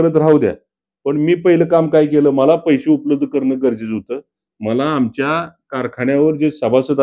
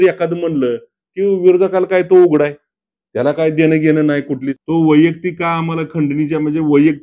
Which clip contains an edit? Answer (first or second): second